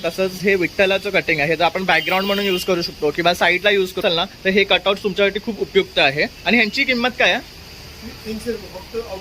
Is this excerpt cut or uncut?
cut